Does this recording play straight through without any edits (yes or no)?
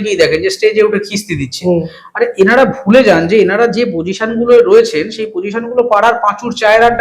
yes